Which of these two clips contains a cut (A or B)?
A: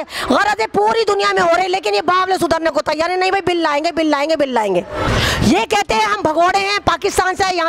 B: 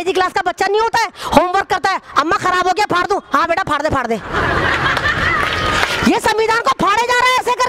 A